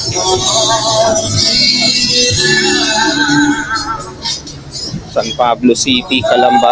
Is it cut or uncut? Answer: uncut